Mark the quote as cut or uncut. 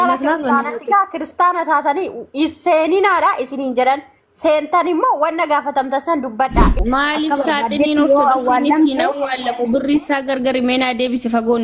cut